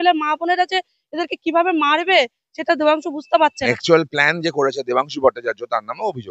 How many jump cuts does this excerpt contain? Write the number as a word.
one